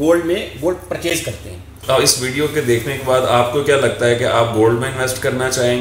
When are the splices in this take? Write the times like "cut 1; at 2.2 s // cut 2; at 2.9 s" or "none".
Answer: cut 1; at 1.7 s